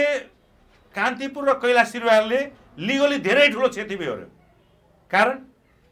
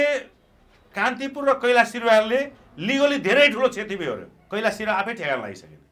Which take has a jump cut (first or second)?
second